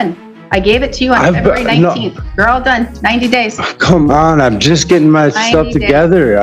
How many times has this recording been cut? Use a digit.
0